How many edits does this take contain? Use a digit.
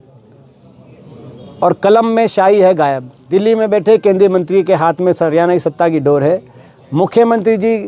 1